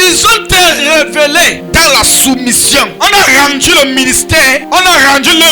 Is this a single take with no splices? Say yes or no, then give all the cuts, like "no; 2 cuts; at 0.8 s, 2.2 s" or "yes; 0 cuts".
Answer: no; 3 cuts; at 1.6 s, 2.9 s, 4.6 s